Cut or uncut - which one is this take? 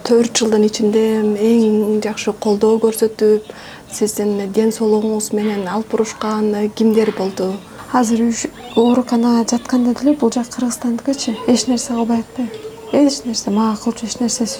cut